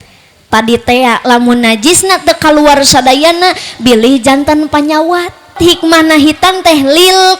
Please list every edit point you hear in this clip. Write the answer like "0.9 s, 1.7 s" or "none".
5.6 s